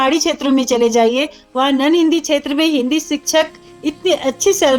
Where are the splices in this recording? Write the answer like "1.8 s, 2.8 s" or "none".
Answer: none